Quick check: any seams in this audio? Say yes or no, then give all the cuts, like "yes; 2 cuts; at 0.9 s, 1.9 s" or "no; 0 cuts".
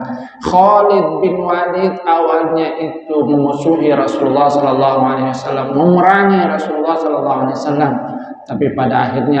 no; 0 cuts